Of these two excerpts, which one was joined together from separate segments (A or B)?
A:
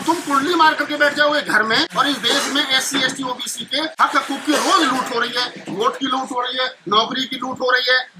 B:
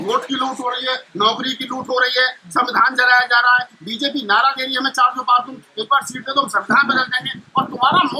A